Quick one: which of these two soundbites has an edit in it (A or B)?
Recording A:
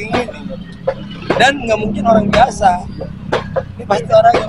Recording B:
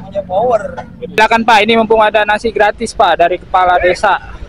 B